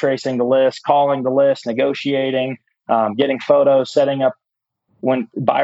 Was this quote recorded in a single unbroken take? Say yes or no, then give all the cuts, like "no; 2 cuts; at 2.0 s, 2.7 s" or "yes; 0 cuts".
yes; 0 cuts